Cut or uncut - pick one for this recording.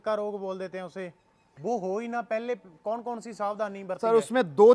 uncut